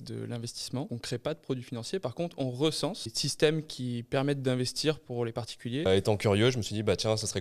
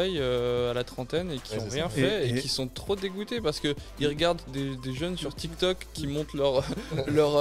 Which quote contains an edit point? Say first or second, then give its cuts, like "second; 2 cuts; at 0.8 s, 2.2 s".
first; 3 cuts; at 1.0 s, 3.2 s, 5.9 s